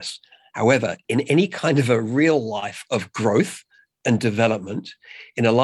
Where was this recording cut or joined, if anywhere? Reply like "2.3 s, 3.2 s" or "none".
1.0 s